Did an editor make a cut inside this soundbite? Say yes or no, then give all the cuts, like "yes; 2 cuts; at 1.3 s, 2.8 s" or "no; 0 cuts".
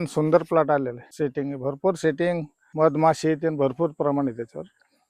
yes; 2 cuts; at 1.1 s, 2.6 s